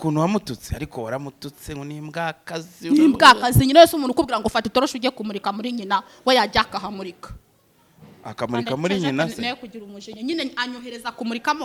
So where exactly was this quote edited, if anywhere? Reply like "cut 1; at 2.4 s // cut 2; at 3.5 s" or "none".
none